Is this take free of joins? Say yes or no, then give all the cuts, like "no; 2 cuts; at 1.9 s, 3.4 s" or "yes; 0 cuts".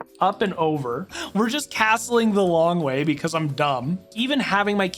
no; 2 cuts; at 1.1 s, 4.1 s